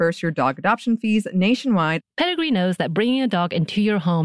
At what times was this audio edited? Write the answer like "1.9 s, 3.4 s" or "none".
2.0 s